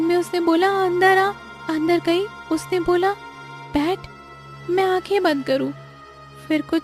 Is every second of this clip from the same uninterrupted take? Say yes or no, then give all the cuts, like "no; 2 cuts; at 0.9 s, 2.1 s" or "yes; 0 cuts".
no; 2 cuts; at 1.5 s, 2.4 s